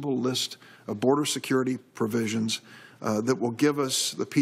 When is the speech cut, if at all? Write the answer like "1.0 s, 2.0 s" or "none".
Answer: 1.3 s